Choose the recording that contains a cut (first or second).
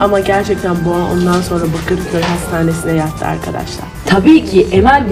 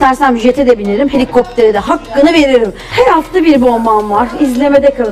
first